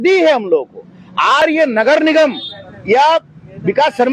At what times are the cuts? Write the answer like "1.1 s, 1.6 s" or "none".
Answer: 1.4 s